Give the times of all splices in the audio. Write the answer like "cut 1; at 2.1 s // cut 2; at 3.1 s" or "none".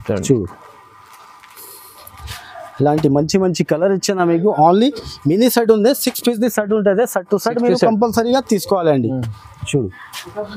none